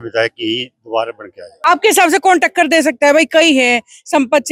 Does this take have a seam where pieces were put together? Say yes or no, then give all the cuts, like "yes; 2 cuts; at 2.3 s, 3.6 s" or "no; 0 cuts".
yes; 1 cut; at 1.5 s